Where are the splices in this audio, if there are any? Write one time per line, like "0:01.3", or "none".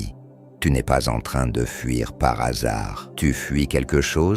0:03.0